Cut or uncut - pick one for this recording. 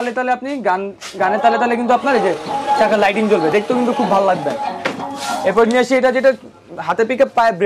uncut